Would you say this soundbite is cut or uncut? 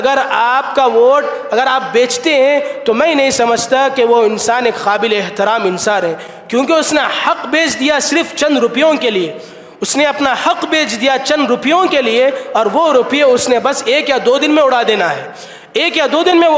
uncut